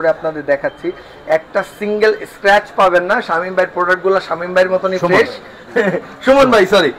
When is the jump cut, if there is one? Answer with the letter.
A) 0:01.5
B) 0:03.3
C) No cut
C